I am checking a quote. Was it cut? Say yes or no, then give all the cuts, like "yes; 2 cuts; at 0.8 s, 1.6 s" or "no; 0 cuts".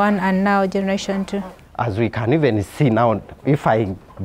no; 0 cuts